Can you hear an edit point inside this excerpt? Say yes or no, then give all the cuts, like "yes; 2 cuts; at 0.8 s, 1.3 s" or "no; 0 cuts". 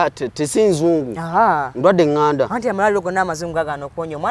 no; 0 cuts